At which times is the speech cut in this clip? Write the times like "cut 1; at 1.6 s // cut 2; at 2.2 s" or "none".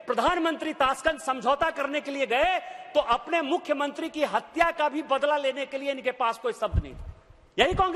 none